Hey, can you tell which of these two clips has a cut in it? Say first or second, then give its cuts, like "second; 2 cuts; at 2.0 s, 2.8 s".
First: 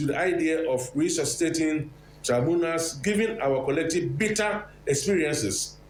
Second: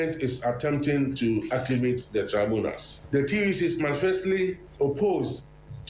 second; 2 cuts; at 2.9 s, 4.6 s